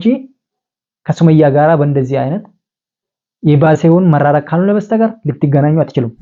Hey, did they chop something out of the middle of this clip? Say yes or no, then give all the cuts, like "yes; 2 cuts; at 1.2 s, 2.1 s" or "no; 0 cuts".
no; 0 cuts